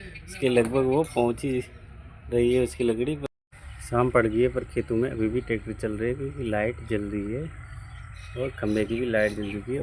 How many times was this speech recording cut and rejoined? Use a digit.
1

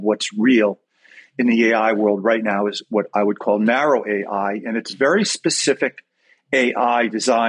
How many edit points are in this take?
0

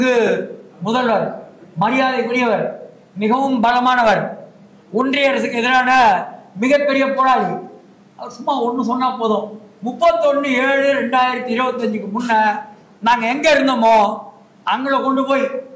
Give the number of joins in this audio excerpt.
0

